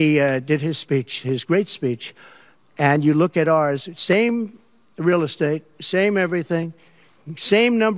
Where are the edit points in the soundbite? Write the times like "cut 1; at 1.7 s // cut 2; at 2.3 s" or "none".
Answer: none